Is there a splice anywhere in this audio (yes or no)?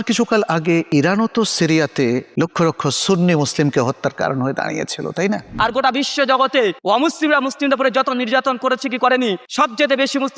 yes